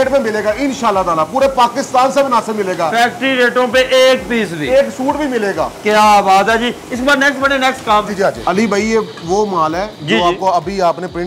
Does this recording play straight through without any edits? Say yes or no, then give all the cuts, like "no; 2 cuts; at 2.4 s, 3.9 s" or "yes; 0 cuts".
yes; 0 cuts